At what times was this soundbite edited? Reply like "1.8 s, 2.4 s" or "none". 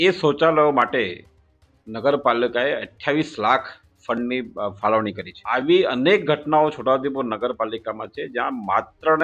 5.3 s